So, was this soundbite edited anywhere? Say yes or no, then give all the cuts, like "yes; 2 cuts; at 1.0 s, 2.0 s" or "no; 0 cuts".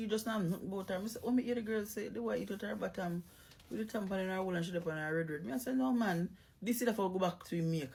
no; 0 cuts